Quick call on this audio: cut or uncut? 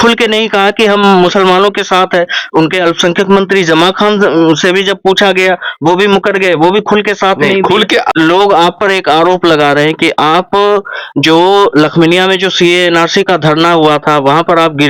cut